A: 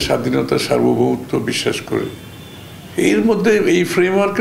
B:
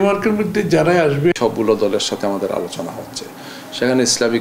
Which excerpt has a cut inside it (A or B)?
B